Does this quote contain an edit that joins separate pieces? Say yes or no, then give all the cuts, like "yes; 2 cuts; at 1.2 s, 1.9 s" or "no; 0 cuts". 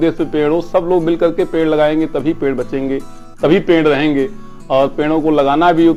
no; 0 cuts